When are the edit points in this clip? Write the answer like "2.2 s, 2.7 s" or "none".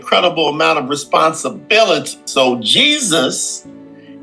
2.1 s

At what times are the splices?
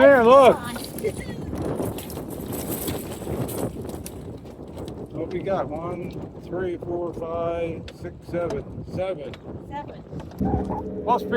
10.2 s

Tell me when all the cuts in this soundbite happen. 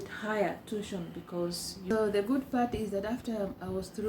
1.9 s

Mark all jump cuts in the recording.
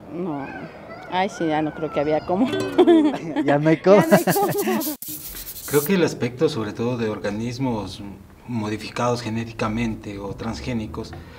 5.1 s

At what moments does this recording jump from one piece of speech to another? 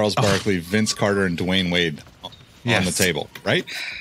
none

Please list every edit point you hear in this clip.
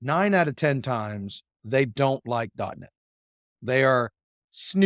none

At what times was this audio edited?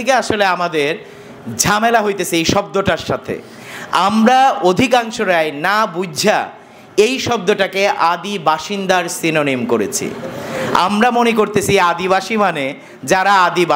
none

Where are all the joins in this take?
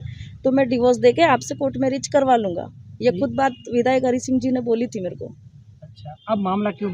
none

